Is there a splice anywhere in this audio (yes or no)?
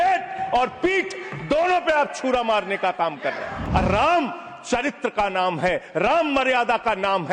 yes